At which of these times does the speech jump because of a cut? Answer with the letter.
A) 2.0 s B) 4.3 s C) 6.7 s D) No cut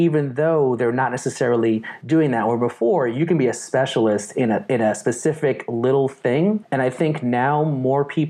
C